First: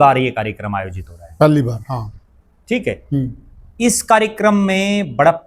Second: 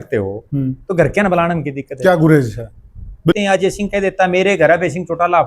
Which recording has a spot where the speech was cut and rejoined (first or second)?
second